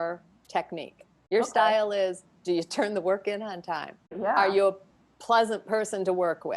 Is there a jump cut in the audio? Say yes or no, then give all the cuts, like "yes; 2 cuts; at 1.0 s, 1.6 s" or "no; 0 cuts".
yes; 2 cuts; at 1.1 s, 4.1 s